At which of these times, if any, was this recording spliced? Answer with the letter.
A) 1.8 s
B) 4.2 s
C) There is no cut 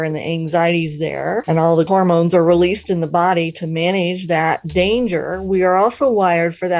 A